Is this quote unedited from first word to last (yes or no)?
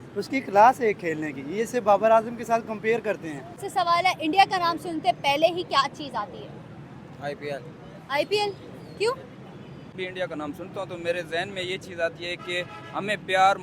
no